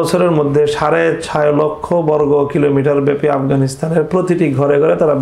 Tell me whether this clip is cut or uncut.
uncut